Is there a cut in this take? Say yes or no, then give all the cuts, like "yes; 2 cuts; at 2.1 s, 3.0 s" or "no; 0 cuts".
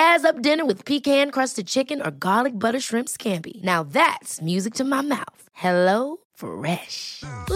no; 0 cuts